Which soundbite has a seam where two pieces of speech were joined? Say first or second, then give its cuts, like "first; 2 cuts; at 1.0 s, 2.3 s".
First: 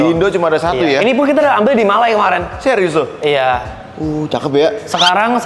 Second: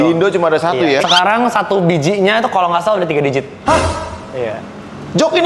second; 1 cut; at 1.0 s